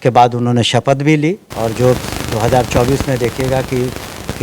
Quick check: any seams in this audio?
yes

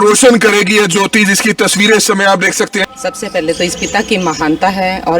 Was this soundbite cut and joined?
yes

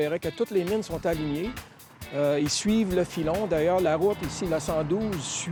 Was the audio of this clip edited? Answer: no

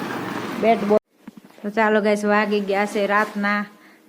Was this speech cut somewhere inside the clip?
yes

